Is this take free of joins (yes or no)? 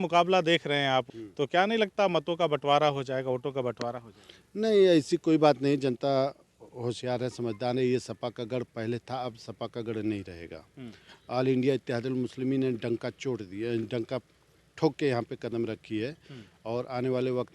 no